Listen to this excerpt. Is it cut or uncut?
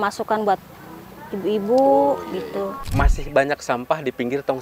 cut